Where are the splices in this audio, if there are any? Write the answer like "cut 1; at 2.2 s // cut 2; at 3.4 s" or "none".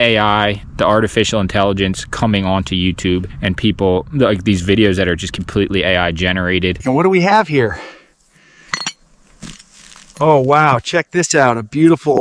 none

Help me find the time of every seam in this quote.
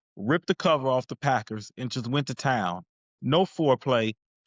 none

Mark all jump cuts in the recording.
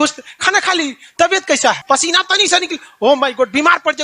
cut 1; at 1.8 s

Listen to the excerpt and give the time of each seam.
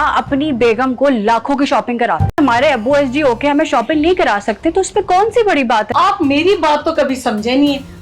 cut 1; at 2.4 s // cut 2; at 5.9 s

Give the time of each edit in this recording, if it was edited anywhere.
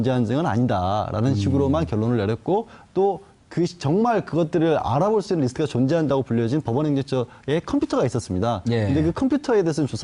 cut 1; at 6.2 s

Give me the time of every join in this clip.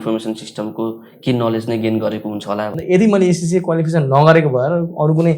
cut 1; at 2.8 s

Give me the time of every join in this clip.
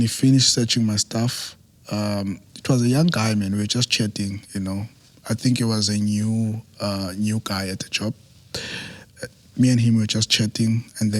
none

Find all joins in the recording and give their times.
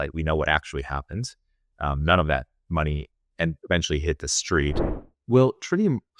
cut 1; at 4.9 s

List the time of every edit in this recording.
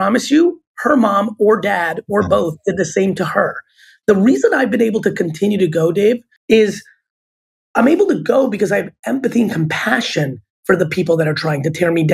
cut 1; at 6.3 s

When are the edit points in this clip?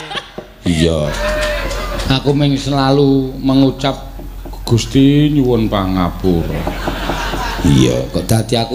cut 1; at 1.1 s

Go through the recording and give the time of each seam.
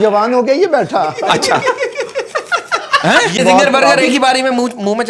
cut 1; at 3.4 s

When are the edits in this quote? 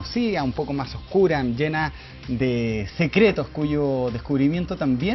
cut 1; at 3.5 s

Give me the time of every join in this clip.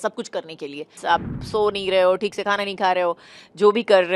cut 1; at 0.9 s

